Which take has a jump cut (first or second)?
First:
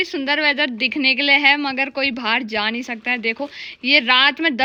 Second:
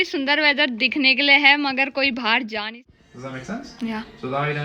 second